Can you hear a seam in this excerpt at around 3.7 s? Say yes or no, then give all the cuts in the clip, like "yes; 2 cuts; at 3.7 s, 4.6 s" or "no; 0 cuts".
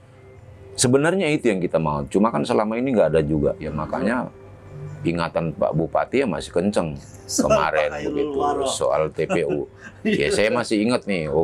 yes; 1 cut; at 3.7 s